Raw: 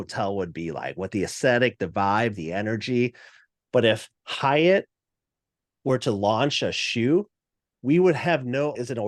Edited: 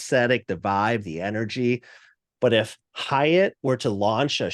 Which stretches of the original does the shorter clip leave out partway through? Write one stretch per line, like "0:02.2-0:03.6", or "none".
0:04.9-0:05.8